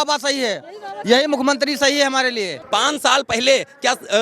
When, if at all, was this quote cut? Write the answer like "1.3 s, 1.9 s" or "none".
2.6 s

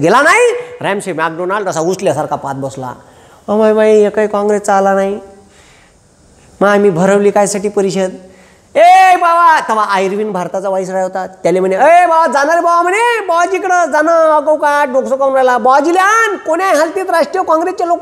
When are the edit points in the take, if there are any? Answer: none

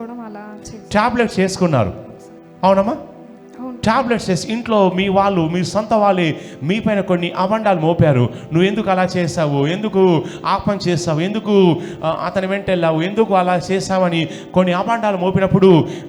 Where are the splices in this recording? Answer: none

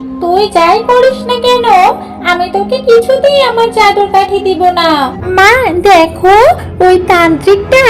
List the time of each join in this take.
5.2 s

